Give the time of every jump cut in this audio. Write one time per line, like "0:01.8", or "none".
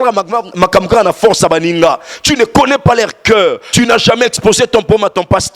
0:03.6